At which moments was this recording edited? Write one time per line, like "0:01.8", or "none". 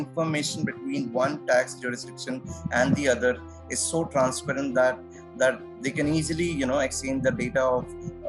none